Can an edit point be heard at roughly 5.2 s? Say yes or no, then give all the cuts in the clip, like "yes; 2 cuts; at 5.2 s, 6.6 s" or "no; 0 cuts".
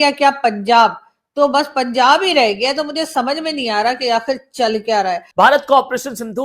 yes; 1 cut; at 5.2 s